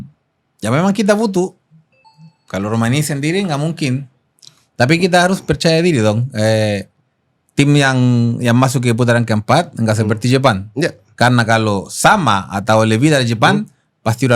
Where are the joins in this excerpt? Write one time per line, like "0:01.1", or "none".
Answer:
none